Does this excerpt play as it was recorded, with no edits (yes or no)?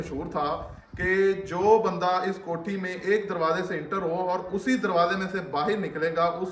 yes